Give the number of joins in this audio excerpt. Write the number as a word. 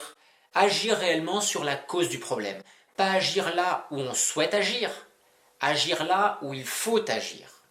zero